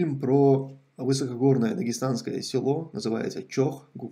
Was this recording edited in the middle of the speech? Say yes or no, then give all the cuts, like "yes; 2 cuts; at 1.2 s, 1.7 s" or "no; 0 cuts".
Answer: no; 0 cuts